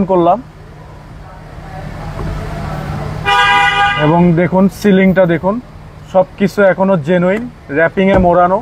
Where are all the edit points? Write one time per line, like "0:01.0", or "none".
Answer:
none